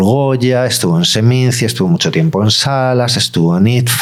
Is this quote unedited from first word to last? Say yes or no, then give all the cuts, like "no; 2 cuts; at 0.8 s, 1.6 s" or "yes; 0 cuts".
yes; 0 cuts